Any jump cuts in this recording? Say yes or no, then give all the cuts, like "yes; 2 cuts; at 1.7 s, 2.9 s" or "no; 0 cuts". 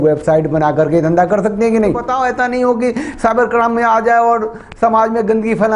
yes; 1 cut; at 2.1 s